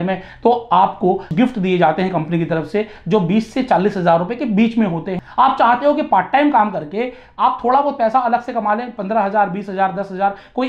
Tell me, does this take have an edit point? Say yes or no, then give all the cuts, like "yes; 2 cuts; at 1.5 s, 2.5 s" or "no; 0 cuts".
yes; 2 cuts; at 1.3 s, 5.1 s